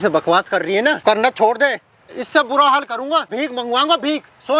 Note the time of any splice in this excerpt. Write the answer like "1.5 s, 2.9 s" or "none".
1.0 s, 2.1 s, 3.3 s